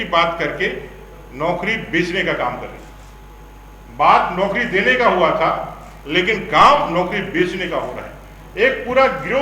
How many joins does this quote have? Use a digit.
0